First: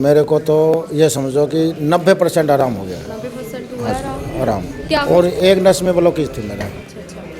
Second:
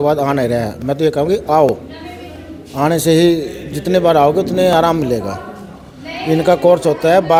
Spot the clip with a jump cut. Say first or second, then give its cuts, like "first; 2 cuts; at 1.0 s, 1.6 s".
first; 1 cut; at 4.9 s